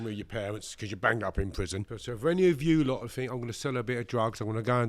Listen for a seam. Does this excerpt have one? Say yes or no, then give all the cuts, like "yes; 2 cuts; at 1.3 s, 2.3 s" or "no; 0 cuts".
yes; 1 cut; at 1.9 s